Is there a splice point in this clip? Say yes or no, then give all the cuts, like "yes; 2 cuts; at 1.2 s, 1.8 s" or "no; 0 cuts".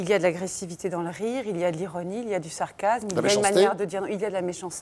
no; 0 cuts